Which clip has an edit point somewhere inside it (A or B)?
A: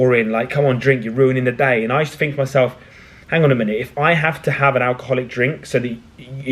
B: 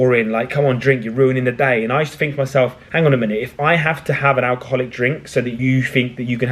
B